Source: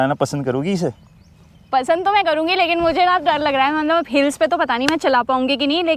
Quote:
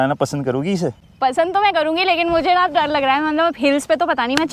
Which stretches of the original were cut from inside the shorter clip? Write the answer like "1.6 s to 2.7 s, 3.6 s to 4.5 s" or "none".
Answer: 1.0 s to 1.6 s